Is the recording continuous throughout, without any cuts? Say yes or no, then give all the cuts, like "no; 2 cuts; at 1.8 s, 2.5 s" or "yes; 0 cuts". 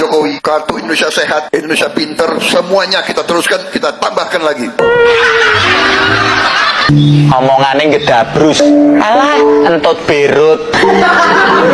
yes; 0 cuts